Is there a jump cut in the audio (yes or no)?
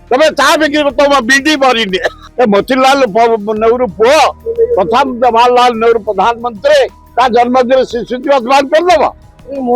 yes